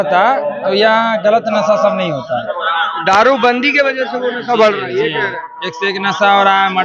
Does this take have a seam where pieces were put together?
no; 0 cuts

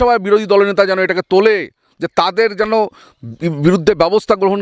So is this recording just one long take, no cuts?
yes; 0 cuts

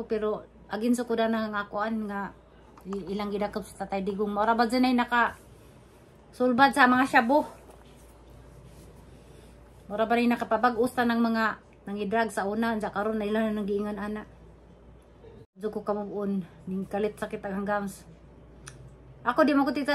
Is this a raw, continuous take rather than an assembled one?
no; 1 cut; at 15.6 s

